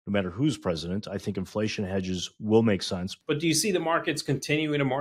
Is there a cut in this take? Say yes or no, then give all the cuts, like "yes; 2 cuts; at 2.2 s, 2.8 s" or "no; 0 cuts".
yes; 1 cut; at 3.1 s